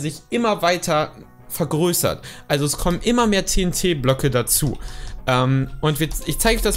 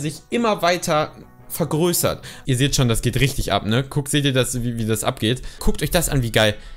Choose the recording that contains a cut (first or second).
second